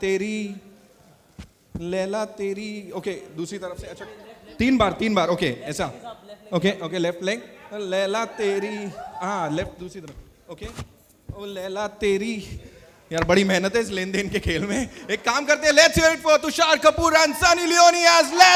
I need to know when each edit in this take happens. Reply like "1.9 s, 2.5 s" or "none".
none